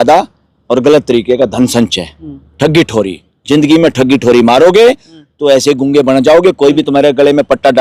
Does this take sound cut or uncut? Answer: uncut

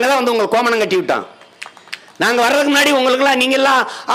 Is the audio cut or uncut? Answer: uncut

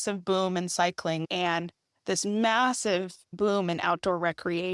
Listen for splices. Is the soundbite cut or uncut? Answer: cut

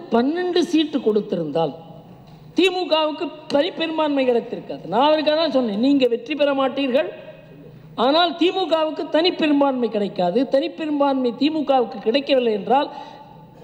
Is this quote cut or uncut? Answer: uncut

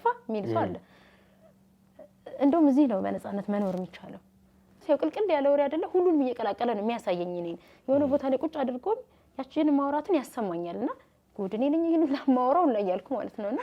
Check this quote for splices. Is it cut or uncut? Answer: cut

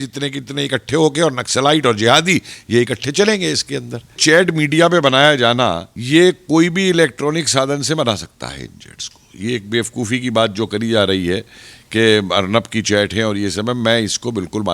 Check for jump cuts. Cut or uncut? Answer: cut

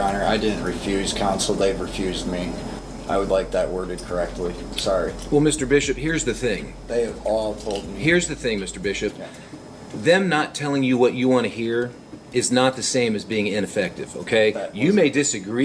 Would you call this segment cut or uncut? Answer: uncut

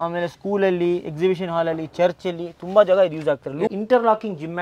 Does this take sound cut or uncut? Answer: cut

